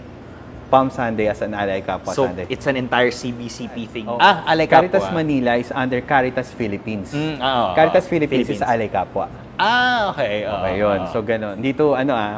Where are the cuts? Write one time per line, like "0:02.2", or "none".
0:03.9
0:11.5

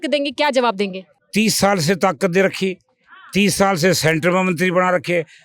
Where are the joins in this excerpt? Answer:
0:01.1

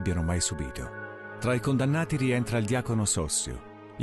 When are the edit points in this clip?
0:01.2

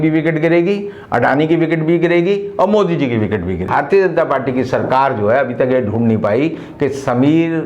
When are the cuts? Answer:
0:03.7

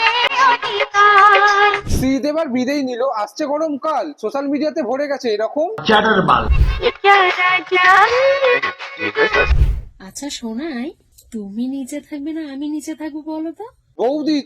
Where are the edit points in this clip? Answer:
0:06.5
0:09.6
0:11.1

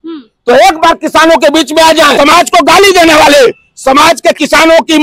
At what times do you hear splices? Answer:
0:02.1

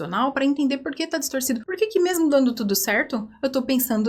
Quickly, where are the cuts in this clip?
0:01.7

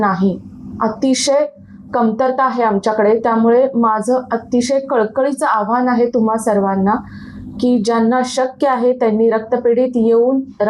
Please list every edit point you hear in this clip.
none

